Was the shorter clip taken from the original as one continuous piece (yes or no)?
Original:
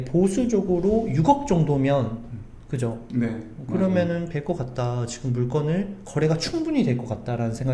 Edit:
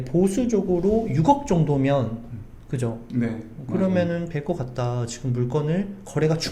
yes